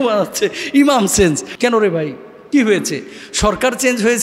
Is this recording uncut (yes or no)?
no